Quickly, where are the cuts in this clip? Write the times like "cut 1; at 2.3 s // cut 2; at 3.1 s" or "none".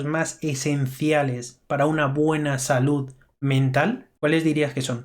cut 1; at 4.1 s